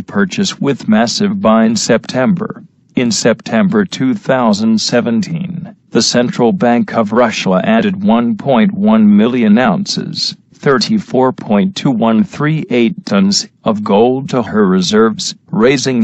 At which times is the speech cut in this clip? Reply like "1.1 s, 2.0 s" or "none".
none